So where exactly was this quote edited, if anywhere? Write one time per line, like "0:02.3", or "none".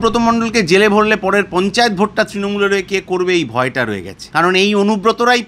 0:04.1